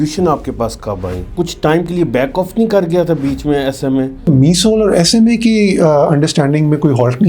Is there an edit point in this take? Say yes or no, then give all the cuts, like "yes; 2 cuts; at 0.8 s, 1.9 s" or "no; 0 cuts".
yes; 2 cuts; at 1.3 s, 4.3 s